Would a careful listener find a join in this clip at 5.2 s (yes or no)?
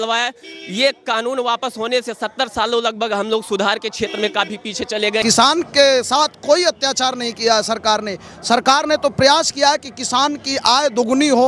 yes